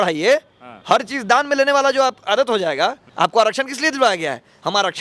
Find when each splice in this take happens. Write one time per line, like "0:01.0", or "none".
0:03.0